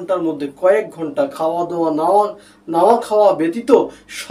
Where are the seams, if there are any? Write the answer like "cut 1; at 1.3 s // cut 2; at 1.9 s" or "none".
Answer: none